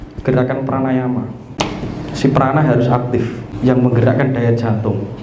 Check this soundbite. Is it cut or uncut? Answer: cut